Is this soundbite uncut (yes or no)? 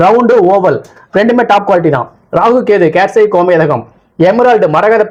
yes